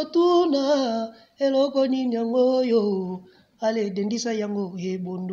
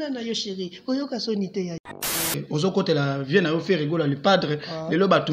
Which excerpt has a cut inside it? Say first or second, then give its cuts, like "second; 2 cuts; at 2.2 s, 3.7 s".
second; 1 cut; at 2.3 s